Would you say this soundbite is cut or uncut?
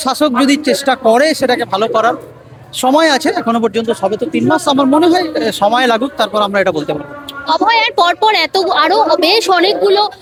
uncut